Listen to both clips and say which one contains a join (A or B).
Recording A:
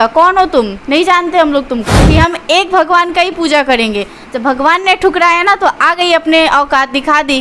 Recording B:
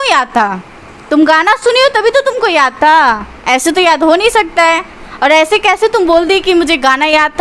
A